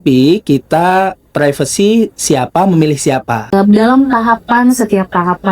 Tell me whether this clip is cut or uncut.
cut